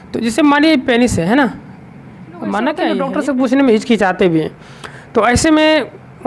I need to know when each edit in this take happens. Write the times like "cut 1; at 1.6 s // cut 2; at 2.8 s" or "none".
cut 1; at 3.0 s